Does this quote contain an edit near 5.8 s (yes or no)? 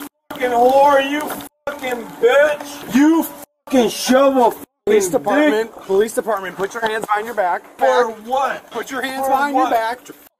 no